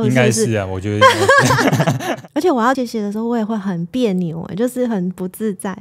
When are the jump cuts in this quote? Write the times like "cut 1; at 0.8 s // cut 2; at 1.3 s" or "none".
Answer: cut 1; at 2.1 s // cut 2; at 2.8 s